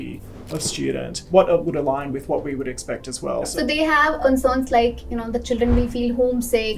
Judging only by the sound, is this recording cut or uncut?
cut